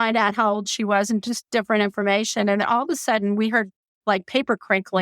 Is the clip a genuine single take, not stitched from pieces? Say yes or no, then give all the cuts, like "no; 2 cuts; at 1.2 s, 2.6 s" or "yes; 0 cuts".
no; 1 cut; at 3.8 s